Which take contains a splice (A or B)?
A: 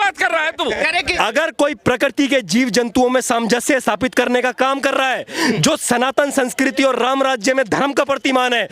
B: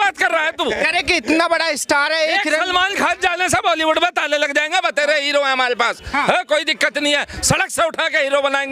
A